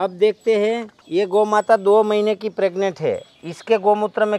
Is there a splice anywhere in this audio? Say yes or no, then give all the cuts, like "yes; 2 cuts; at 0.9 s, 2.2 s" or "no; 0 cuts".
yes; 1 cut; at 0.9 s